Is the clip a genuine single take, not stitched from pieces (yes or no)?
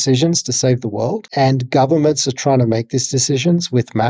no